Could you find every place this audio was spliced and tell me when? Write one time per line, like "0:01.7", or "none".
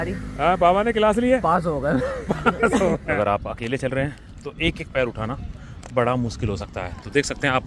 0:03.1